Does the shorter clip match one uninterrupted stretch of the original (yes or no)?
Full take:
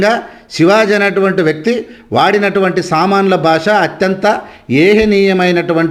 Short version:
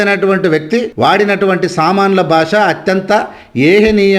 no